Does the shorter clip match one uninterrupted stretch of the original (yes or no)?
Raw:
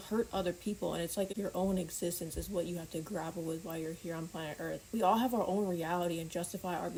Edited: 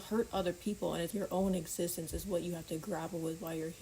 no